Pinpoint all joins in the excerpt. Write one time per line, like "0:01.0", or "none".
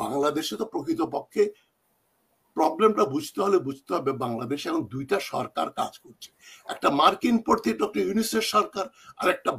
none